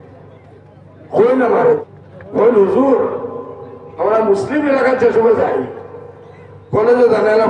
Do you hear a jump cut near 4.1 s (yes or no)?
no